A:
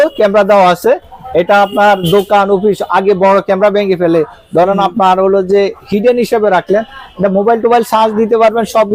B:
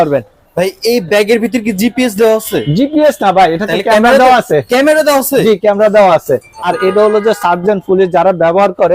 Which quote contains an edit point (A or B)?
B